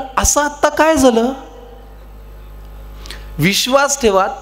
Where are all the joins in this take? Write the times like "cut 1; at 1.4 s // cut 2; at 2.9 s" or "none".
none